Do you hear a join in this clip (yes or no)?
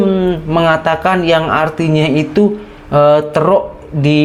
no